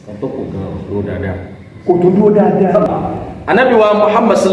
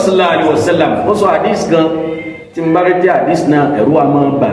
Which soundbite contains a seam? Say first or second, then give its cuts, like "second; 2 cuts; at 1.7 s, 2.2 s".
first; 1 cut; at 3.0 s